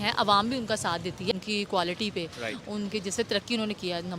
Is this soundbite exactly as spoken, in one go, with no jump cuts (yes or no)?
no